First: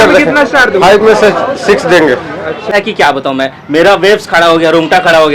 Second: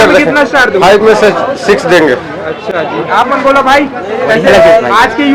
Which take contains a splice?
first; 1 cut; at 2.7 s

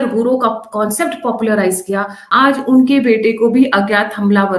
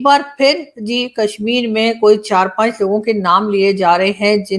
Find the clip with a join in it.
first; 1 cut; at 2.2 s

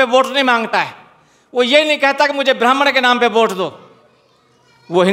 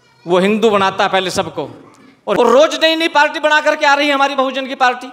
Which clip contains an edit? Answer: second; 1 cut; at 2.3 s

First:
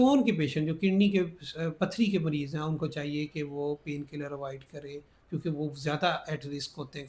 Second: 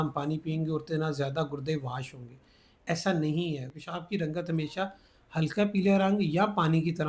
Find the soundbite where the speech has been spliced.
second; 1 cut; at 3.7 s

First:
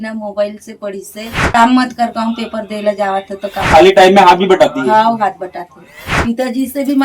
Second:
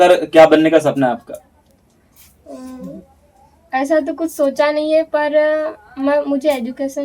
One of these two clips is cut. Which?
first; 3 cuts; at 1.5 s, 3.7 s, 6.0 s

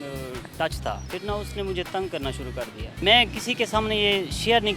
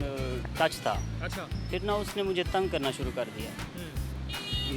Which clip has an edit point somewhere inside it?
first; 2 cuts; at 1.0 s, 2.9 s

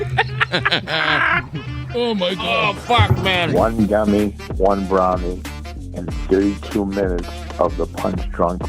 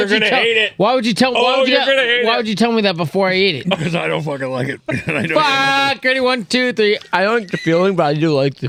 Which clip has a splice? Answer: first; 1 cut; at 3.5 s

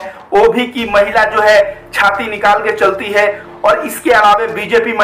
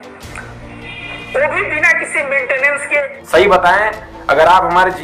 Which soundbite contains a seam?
second; 1 cut; at 3.2 s

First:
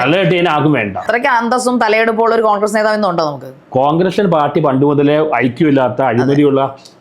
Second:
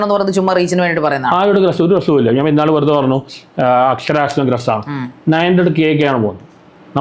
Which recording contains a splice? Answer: first; 1 cut; at 1.0 s

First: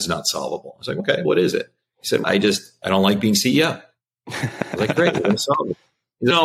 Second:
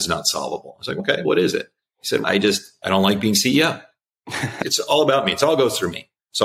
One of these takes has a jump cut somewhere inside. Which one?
second; 1 cut; at 4.6 s

